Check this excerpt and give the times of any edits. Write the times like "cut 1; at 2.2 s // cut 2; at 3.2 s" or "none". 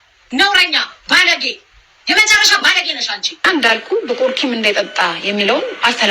cut 1; at 3.3 s